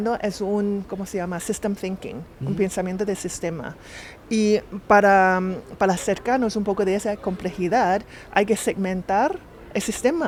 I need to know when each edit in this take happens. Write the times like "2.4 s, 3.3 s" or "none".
none